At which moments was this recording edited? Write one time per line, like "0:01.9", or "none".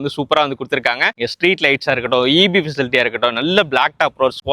none